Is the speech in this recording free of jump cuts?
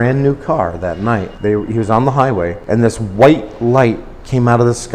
no; 2 cuts; at 1.3 s, 2.6 s

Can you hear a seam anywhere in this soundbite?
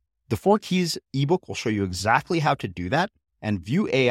no; 0 cuts

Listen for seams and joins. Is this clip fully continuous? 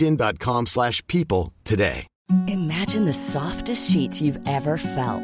no; 1 cut; at 2.1 s

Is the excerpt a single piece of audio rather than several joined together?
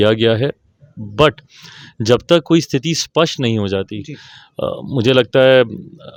yes; 0 cuts

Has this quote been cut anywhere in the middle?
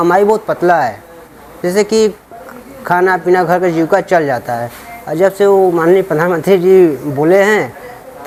no; 0 cuts

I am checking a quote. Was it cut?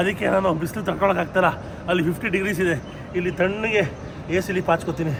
no; 0 cuts

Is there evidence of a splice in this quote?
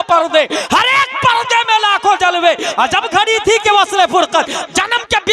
no; 0 cuts

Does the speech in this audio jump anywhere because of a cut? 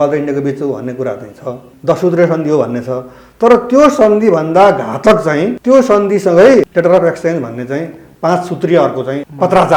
no; 0 cuts

